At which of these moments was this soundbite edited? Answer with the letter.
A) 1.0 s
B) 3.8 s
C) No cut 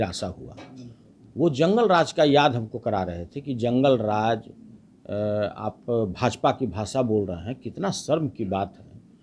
C